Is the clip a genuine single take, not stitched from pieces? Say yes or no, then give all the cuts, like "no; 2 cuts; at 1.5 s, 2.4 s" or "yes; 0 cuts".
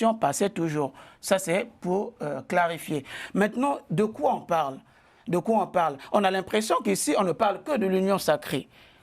yes; 0 cuts